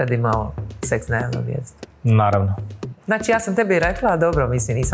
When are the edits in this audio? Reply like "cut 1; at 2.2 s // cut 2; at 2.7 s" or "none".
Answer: cut 1; at 2.9 s